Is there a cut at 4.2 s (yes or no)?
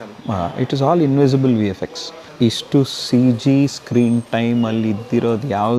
no